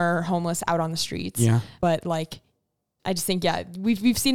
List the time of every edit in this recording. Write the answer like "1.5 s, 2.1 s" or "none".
2.9 s